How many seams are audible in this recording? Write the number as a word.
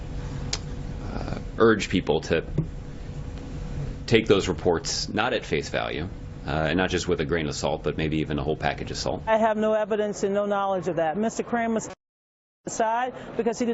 one